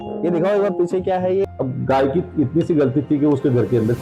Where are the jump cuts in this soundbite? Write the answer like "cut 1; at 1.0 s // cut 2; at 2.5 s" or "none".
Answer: cut 1; at 1.5 s